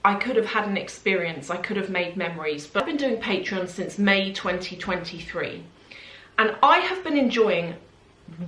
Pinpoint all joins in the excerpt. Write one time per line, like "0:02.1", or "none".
0:02.8